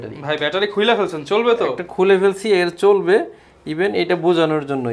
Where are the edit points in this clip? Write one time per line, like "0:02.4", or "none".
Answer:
none